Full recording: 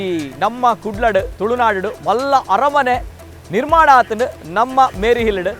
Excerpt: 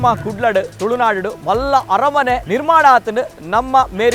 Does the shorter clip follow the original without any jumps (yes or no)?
no